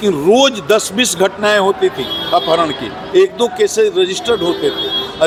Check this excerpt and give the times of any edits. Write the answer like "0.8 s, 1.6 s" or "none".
none